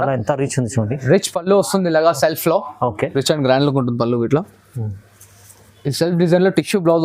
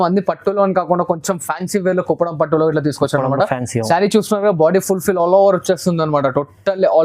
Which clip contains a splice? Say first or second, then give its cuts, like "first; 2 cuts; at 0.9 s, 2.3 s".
first; 1 cut; at 3.1 s